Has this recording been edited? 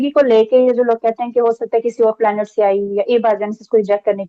no; 0 cuts

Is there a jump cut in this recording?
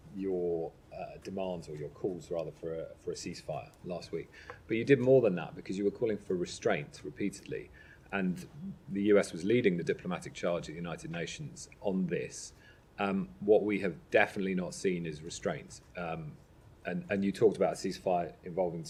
no; 0 cuts

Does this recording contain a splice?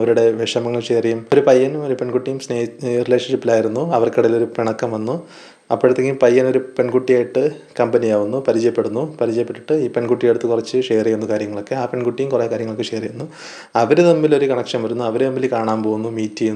yes; 1 cut; at 1.3 s

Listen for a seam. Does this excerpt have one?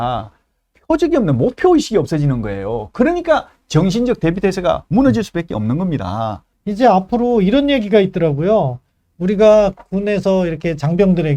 yes; 1 cut; at 6.5 s

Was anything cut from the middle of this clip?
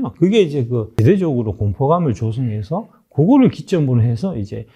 yes; 1 cut; at 0.9 s

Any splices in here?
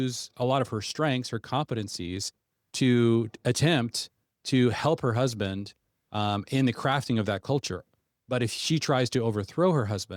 no; 0 cuts

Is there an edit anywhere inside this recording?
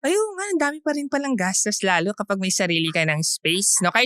no; 0 cuts

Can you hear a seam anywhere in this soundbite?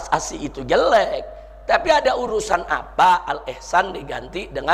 no; 0 cuts

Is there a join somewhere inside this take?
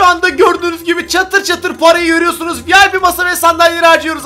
no; 0 cuts

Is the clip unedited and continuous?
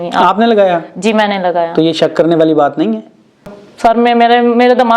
no; 1 cut; at 3.6 s

